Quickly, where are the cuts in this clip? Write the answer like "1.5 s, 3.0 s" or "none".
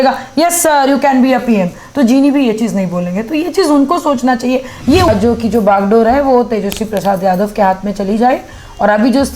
5.1 s